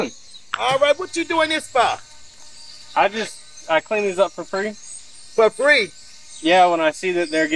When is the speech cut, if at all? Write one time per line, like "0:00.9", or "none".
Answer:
none